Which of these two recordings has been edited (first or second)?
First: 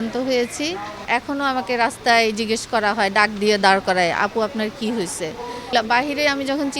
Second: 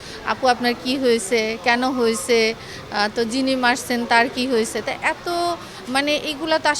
first